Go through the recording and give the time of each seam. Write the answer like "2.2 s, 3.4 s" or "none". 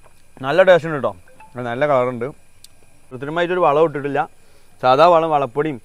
3.2 s